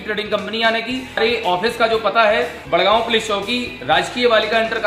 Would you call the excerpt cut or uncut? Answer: cut